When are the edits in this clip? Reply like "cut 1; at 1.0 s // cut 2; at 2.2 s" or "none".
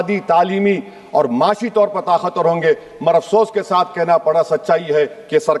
none